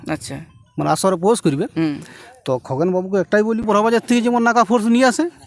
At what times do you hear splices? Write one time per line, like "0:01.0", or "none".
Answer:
0:03.6